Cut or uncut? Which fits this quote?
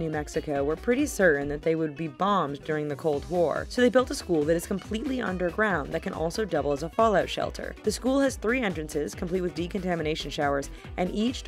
cut